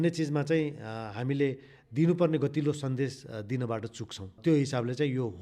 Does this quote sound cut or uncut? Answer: uncut